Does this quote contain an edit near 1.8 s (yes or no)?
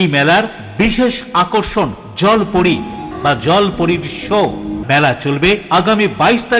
no